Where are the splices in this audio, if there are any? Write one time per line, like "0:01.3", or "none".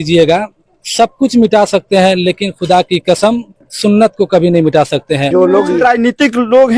none